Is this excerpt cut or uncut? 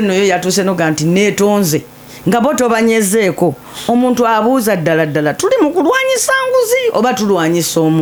uncut